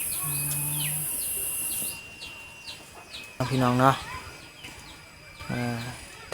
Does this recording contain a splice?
yes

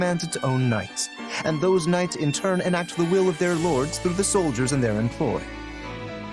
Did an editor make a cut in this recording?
yes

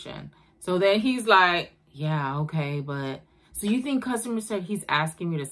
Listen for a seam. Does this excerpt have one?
no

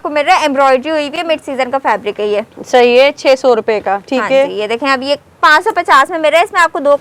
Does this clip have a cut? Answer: no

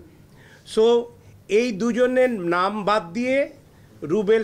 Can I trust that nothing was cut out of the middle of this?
yes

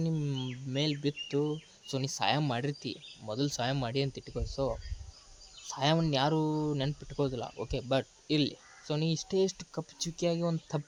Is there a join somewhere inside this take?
no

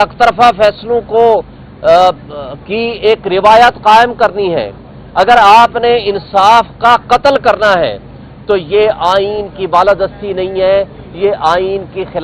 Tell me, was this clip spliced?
no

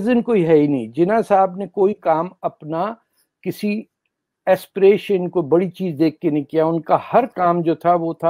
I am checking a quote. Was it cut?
no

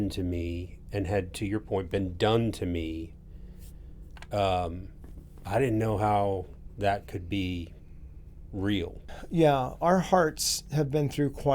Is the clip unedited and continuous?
no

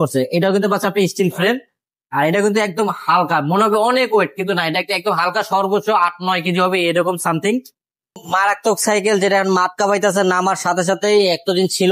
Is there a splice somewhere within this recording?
yes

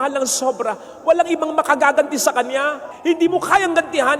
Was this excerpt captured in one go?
no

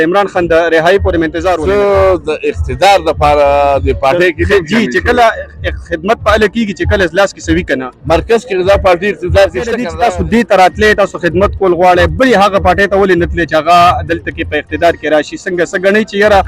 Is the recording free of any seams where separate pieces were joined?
no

